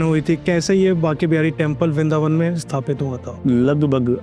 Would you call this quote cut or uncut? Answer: cut